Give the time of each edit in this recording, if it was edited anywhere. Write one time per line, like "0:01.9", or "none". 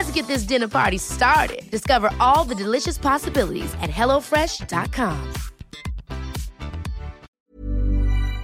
0:07.3

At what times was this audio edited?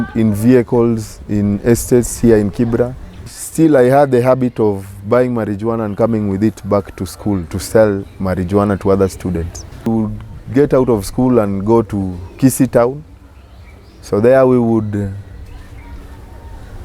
0:03.4
0:09.9

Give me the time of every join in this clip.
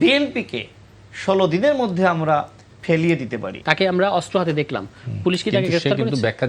0:03.4

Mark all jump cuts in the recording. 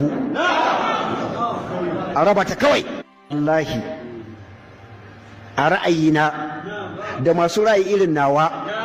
none

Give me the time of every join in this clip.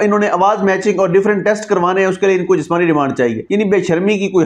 0:03.4

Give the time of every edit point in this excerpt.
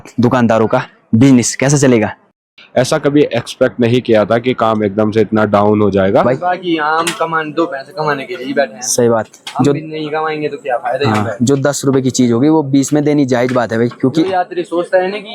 0:02.4
0:06.2

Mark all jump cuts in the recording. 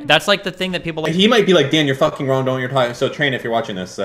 0:01.0

